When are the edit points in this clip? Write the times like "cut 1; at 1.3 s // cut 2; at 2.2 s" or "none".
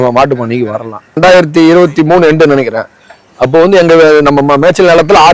cut 1; at 1.2 s